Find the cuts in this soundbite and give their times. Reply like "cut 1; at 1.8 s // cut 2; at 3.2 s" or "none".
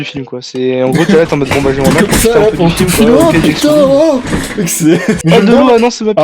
cut 1; at 5.2 s